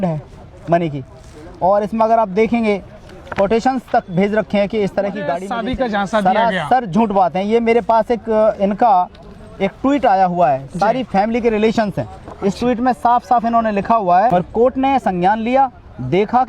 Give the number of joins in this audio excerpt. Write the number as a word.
two